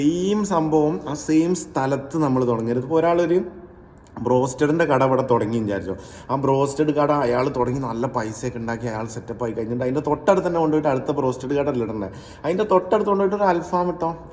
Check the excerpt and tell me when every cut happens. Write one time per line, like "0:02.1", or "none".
none